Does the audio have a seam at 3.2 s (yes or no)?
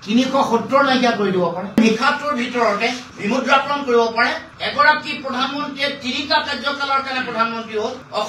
no